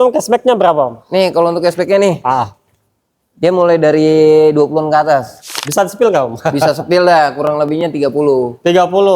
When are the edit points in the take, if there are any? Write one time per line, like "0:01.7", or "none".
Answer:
0:05.6